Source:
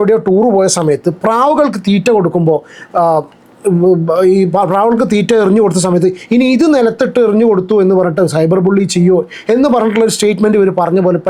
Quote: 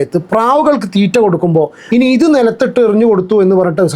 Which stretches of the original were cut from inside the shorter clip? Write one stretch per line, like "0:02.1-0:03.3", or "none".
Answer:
0:02.7-0:06.2